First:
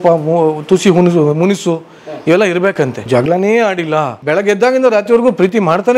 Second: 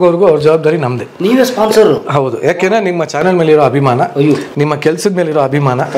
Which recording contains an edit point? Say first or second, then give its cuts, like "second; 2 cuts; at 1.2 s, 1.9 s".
first; 2 cuts; at 3.1 s, 4.2 s